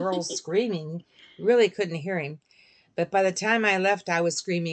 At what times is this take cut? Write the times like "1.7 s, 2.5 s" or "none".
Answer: none